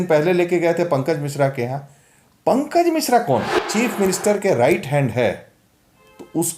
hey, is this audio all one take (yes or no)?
no